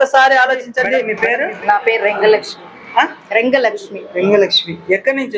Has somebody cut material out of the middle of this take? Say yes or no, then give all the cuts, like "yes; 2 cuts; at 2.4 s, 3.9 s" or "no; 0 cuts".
yes; 1 cut; at 1.1 s